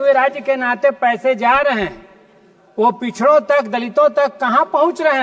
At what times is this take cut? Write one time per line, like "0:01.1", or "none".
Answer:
none